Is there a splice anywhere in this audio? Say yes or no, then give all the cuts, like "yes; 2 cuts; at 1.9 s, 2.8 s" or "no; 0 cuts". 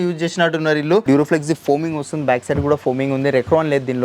yes; 1 cut; at 1.0 s